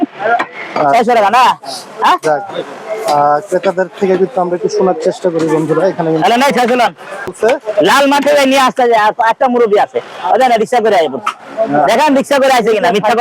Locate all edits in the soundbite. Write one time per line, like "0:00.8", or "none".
0:07.3